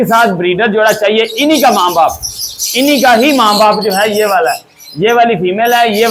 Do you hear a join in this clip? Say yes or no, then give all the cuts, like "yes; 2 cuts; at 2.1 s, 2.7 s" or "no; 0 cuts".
no; 0 cuts